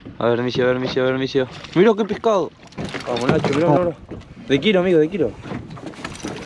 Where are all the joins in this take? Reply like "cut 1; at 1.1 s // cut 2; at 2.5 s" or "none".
cut 1; at 2.9 s